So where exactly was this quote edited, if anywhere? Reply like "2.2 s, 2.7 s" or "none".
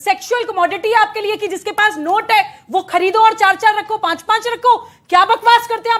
none